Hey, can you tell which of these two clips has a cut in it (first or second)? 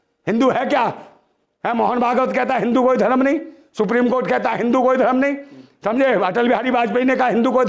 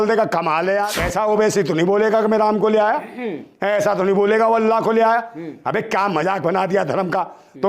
second